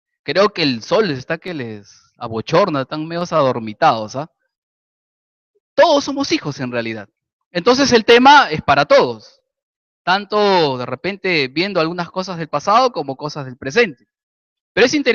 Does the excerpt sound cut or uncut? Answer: cut